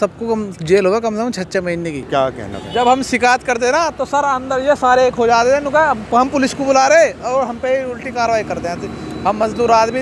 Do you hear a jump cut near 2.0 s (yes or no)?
yes